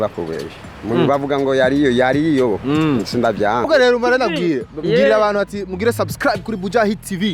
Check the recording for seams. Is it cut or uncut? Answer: cut